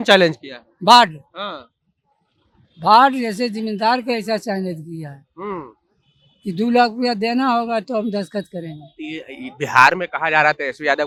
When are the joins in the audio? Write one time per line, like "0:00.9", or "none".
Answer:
none